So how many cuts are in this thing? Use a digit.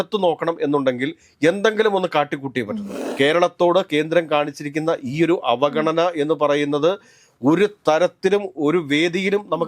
1